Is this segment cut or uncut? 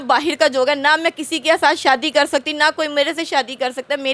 uncut